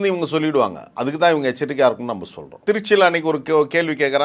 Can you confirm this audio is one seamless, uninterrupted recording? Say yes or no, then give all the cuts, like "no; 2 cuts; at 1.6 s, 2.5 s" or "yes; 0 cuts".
no; 1 cut; at 2.5 s